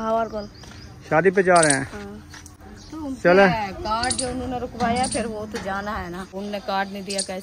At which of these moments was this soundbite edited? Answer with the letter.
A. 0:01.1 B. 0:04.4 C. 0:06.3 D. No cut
C